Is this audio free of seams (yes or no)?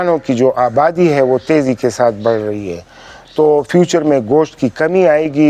yes